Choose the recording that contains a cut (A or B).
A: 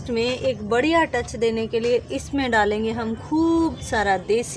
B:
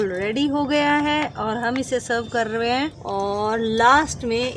B